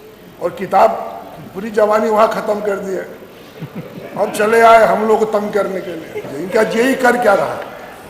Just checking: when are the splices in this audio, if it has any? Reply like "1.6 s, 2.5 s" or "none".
6.2 s